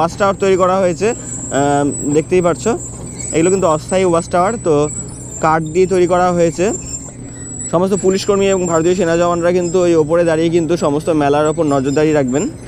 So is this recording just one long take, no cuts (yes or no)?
yes